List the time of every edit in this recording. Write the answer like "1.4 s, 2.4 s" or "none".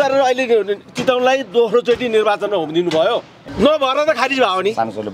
3.4 s